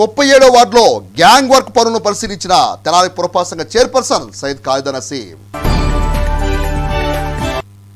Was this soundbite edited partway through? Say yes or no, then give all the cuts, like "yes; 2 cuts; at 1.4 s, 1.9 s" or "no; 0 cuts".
yes; 1 cut; at 5.5 s